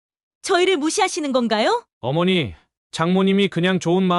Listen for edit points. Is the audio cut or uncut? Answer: cut